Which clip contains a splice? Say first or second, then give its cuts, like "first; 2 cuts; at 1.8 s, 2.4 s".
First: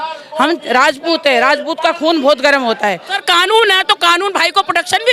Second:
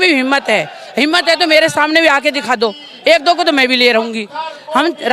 first; 1 cut; at 3.1 s